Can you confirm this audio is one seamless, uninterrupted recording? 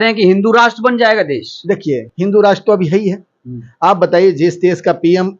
yes; 0 cuts

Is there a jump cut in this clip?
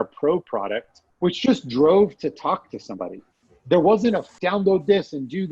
yes; 1 cut; at 4.3 s

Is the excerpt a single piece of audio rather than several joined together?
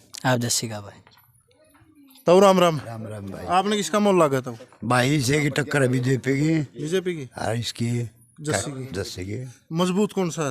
yes; 0 cuts

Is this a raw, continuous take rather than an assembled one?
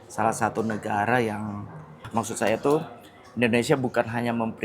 no; 1 cut; at 2.1 s

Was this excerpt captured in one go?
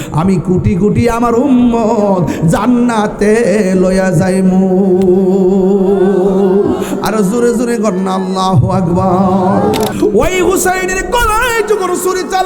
no; 1 cut; at 9.9 s

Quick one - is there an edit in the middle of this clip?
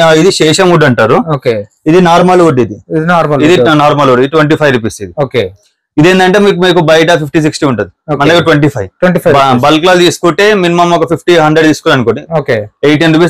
no; 0 cuts

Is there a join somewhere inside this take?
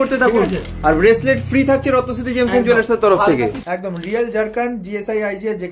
yes; 1 cut; at 3.6 s

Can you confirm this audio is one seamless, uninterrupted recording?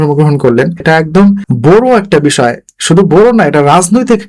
no; 1 cut; at 1.1 s

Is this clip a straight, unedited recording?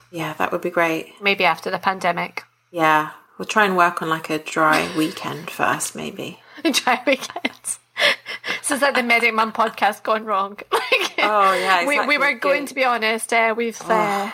yes; 0 cuts

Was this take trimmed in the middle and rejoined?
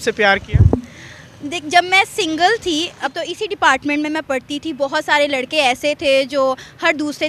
yes; 1 cut; at 3.1 s

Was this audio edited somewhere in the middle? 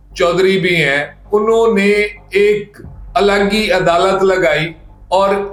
no; 0 cuts

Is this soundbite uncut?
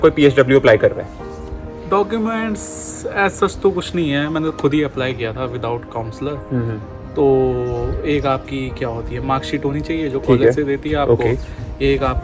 yes; 0 cuts

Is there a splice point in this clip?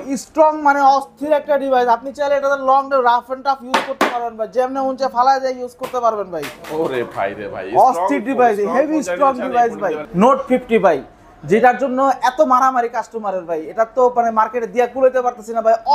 yes; 1 cut; at 10.0 s

